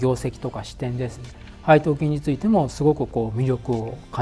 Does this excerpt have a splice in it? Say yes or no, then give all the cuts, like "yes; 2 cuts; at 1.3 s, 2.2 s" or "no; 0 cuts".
no; 0 cuts